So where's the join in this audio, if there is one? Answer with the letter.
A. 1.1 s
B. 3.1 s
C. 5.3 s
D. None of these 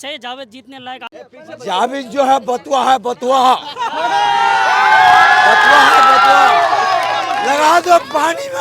A